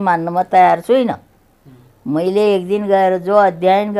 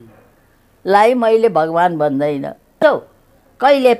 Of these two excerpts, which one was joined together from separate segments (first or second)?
second